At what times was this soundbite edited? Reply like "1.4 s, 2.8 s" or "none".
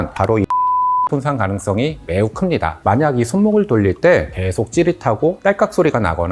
2.8 s

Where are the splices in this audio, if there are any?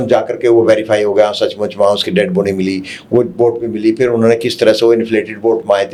none

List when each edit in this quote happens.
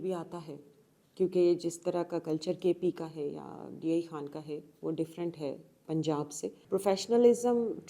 6.6 s

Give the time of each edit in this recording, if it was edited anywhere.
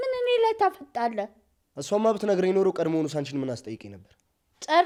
none

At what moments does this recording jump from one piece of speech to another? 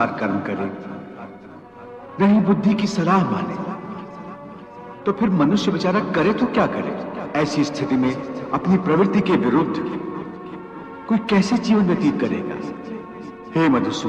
7.2 s

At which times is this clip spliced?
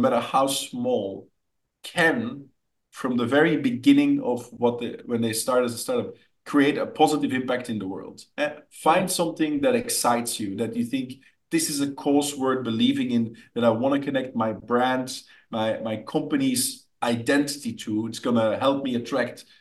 none

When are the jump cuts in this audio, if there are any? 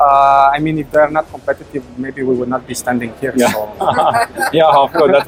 none

